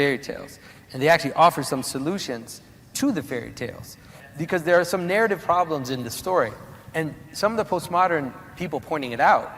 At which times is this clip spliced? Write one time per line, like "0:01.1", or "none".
0:04.2